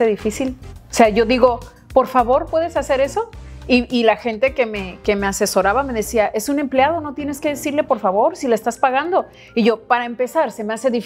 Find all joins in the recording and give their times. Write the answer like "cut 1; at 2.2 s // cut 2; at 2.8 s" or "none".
none